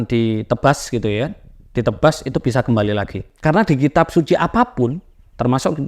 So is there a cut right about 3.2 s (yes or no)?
yes